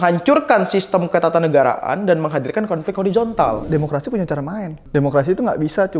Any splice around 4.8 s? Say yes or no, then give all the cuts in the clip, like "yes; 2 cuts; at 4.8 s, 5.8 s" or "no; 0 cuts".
yes; 2 cuts; at 3.6 s, 4.8 s